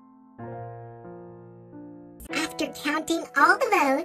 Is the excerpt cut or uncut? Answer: cut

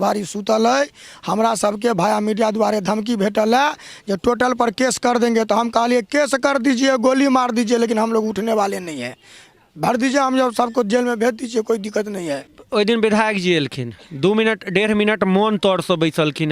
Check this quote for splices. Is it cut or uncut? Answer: cut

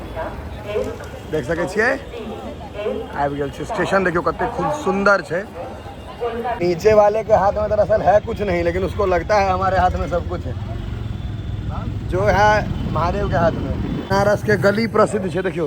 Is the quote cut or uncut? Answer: cut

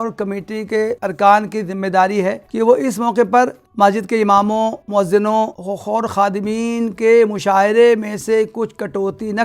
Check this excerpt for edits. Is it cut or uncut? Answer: cut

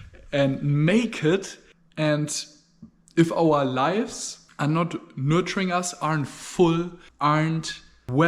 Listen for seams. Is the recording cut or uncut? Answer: cut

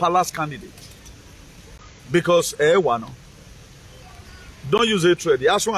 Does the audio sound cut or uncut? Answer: cut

